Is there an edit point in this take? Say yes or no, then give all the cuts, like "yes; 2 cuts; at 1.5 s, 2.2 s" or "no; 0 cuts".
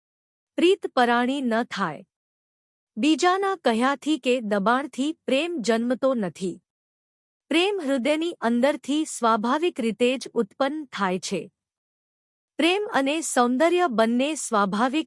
no; 0 cuts